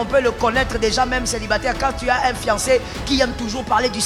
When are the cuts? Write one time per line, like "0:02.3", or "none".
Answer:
none